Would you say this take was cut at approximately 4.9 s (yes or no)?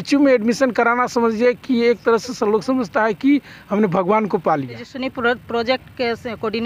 yes